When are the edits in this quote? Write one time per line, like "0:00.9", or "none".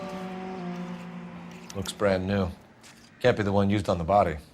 0:01.6